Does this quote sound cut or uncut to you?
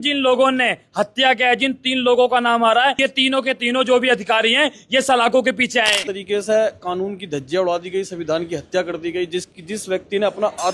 cut